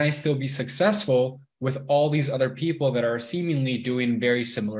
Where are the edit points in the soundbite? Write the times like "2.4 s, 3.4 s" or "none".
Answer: none